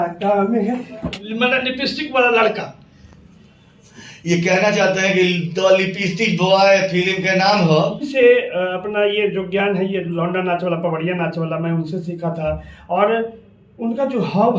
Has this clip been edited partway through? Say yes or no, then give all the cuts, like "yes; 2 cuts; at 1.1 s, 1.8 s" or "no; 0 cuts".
yes; 2 cuts; at 1.0 s, 8.0 s